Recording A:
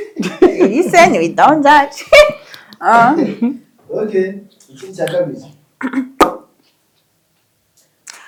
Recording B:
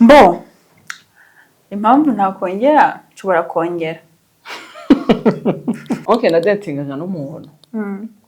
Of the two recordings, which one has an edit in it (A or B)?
B